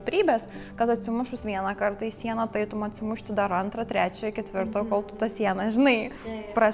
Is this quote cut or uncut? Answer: uncut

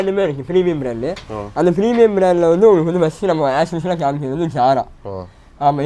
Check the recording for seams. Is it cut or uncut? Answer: uncut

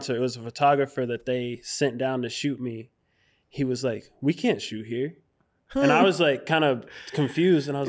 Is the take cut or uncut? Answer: uncut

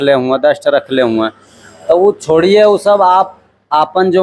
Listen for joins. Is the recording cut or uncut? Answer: uncut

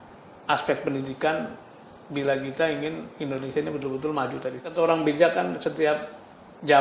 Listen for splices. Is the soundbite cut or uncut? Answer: cut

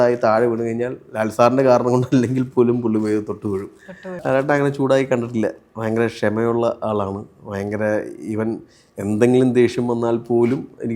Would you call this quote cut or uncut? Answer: cut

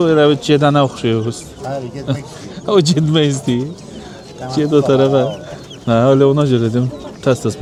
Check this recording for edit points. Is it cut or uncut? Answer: uncut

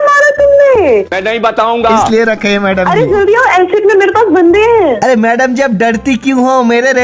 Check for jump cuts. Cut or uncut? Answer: cut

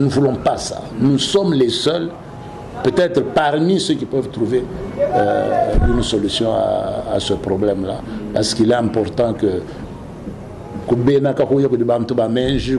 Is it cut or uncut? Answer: uncut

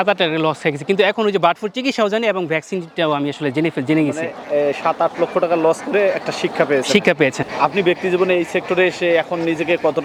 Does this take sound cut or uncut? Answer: uncut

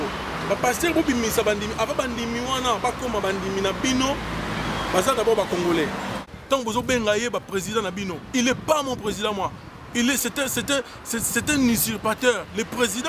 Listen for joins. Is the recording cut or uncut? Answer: cut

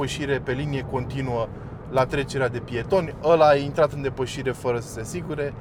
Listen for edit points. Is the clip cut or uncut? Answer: uncut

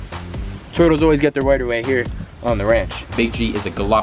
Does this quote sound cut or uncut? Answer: cut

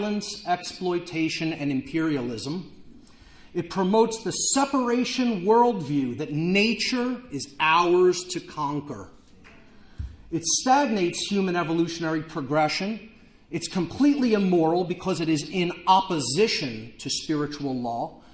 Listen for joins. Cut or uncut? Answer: uncut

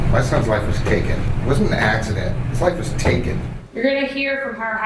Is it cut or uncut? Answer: cut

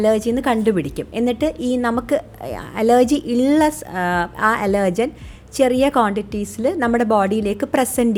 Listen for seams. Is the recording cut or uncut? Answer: uncut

